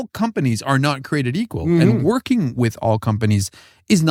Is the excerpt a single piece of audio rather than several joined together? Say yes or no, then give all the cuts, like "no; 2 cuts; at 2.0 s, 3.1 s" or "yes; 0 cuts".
yes; 0 cuts